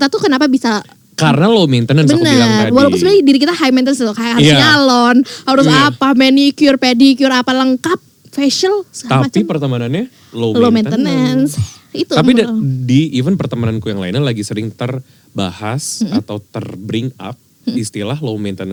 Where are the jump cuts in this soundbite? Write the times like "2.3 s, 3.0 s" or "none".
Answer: none